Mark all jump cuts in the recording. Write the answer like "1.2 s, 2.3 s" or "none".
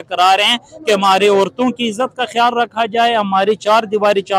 none